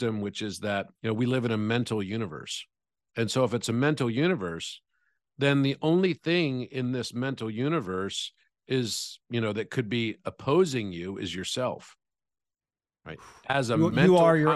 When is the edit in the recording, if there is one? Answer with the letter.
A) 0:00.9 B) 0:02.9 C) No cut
A